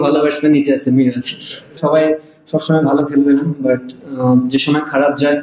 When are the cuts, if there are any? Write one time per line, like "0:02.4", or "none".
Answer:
0:01.8